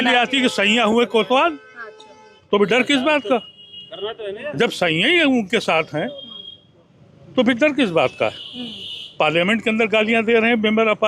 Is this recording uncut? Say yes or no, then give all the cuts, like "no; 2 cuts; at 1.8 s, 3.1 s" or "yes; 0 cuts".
yes; 0 cuts